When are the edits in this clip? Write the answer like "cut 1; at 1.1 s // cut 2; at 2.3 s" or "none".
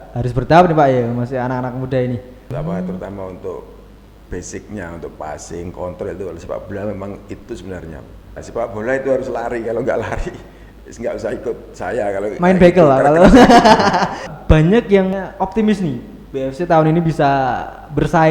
cut 1; at 2.4 s // cut 2; at 8.4 s // cut 3; at 14.3 s // cut 4; at 15.1 s